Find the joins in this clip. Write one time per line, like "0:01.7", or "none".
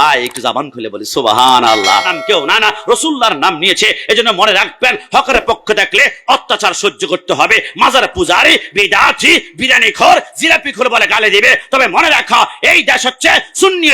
0:02.1